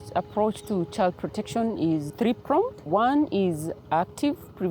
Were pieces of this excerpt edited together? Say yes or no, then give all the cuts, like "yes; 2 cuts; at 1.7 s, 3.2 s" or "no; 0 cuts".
yes; 1 cut; at 2.1 s